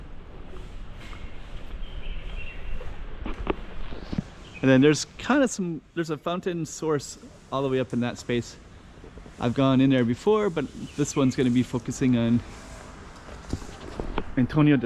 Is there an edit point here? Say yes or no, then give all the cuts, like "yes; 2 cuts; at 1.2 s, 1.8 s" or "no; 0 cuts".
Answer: no; 0 cuts